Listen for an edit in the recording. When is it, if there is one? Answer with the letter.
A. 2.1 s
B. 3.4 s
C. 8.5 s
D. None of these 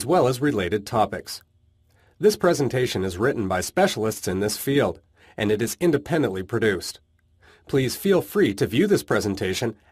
B